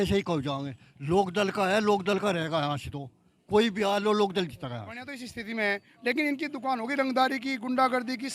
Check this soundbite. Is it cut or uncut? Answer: cut